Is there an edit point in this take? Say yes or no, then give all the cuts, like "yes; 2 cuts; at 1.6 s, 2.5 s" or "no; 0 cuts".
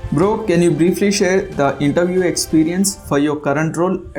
no; 0 cuts